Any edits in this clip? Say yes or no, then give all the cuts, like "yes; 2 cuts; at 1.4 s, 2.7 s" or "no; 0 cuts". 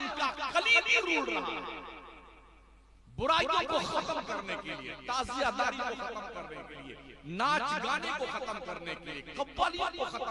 no; 0 cuts